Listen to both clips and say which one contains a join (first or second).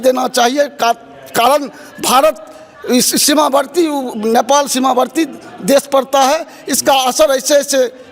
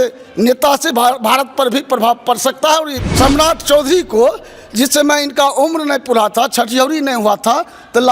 second